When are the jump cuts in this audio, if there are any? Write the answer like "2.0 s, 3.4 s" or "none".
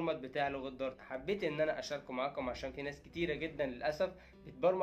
1.0 s